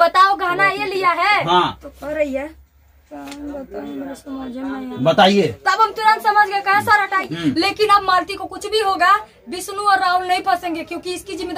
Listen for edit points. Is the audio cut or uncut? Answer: cut